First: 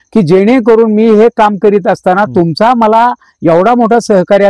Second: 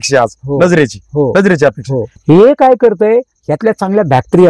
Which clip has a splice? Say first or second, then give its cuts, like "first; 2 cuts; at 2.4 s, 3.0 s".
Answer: second; 1 cut; at 2.1 s